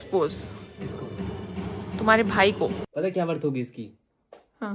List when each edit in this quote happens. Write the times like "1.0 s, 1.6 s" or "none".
2.9 s